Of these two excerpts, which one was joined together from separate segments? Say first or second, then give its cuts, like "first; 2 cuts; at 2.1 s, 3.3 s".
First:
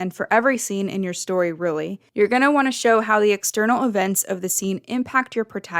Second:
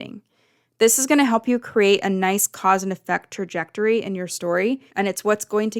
second; 1 cut; at 4.9 s